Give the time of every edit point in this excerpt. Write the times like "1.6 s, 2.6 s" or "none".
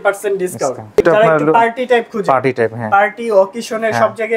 1.0 s